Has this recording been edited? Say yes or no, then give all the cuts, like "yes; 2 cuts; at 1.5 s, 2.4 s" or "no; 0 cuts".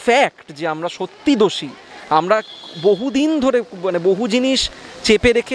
no; 0 cuts